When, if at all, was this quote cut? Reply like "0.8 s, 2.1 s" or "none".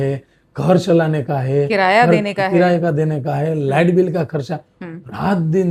none